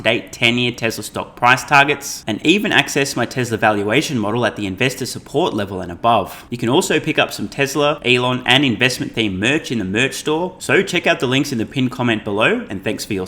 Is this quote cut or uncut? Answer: cut